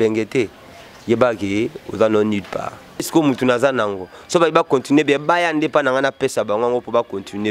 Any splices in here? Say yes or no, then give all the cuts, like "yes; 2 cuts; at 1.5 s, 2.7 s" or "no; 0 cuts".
yes; 1 cut; at 3.1 s